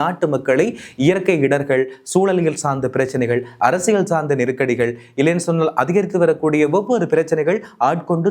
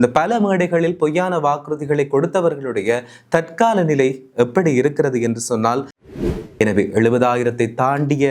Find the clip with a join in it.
second; 1 cut; at 5.9 s

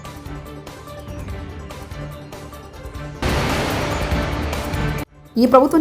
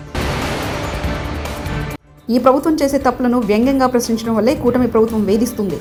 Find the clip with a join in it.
first; 1 cut; at 1.8 s

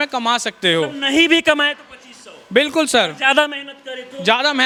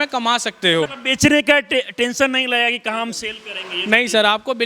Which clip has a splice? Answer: second; 1 cut; at 1.0 s

